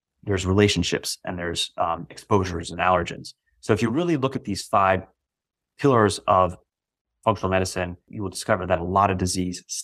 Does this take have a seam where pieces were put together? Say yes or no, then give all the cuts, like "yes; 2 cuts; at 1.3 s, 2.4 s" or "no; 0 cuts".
yes; 1 cut; at 8.1 s